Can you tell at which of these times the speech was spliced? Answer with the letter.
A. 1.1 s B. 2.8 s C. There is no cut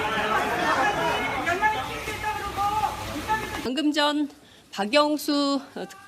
A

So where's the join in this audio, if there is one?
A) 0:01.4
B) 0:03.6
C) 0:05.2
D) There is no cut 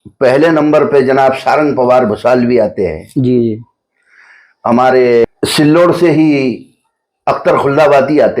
C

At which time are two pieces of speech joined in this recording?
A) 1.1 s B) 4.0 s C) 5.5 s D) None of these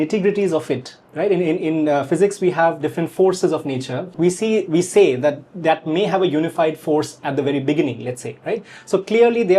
B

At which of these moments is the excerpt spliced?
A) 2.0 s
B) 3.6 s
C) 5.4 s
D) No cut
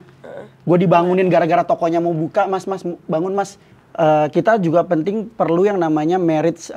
B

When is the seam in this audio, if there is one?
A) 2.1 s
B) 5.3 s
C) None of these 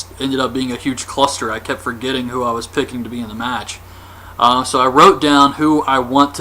B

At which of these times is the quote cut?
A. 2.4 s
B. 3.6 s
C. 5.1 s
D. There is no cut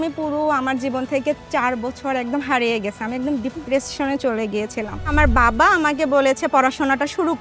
C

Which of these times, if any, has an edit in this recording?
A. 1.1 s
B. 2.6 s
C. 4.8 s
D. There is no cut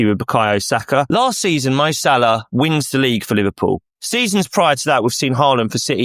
A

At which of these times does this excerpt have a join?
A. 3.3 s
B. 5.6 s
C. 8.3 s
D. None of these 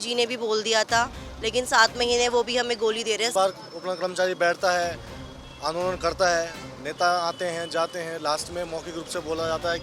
A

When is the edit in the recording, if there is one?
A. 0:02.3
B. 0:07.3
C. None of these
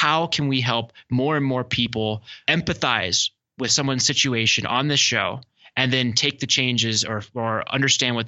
A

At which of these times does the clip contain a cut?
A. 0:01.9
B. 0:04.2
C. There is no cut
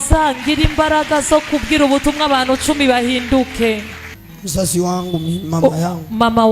B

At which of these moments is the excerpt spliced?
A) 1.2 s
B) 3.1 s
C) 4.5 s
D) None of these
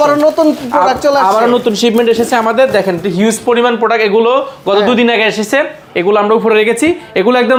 D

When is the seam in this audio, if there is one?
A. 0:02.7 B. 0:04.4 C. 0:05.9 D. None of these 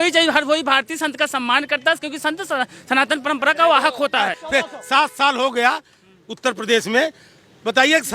B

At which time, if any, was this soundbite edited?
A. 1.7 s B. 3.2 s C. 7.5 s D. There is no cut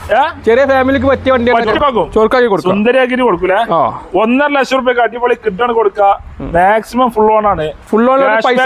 A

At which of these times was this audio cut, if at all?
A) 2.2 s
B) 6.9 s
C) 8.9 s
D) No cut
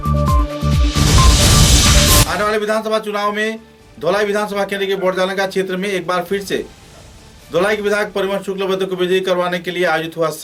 D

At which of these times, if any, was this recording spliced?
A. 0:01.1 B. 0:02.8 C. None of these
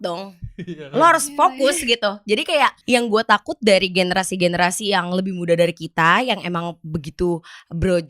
B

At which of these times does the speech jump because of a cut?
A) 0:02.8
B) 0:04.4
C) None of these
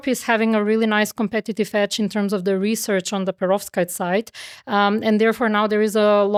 C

